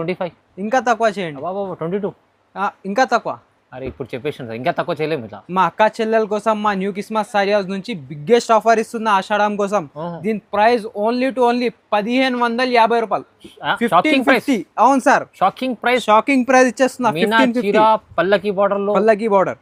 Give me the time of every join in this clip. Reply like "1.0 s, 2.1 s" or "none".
none